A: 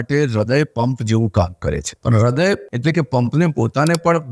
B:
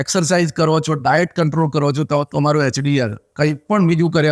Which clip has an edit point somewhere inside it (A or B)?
A